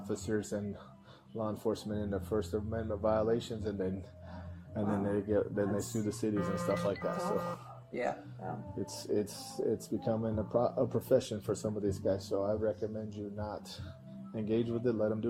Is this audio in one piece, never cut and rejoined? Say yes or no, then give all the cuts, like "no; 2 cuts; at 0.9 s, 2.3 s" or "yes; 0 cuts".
yes; 0 cuts